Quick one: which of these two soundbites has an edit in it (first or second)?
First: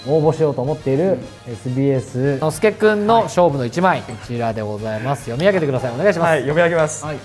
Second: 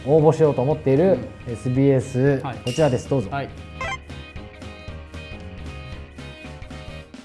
first